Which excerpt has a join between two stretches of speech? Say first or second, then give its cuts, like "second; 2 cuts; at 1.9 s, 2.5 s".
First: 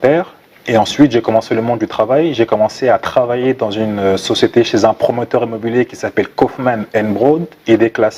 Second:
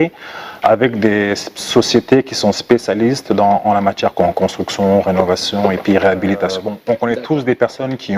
second; 1 cut; at 6.7 s